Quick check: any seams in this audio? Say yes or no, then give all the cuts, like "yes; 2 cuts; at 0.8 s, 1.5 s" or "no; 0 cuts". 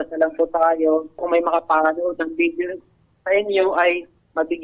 yes; 1 cut; at 1.2 s